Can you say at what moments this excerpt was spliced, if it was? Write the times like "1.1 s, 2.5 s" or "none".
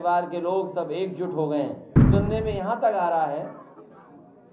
1.9 s